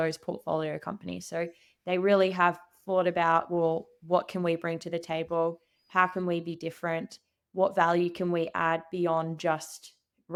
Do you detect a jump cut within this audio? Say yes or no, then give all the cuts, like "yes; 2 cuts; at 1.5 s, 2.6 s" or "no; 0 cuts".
no; 0 cuts